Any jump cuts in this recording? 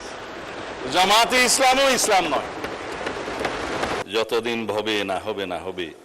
yes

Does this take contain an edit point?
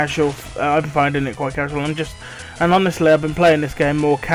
no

